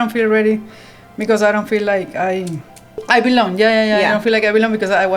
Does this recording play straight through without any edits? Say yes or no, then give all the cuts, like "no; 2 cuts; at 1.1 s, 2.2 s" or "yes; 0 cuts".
no; 1 cut; at 3.0 s